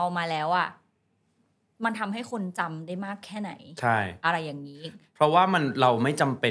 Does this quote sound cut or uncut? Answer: uncut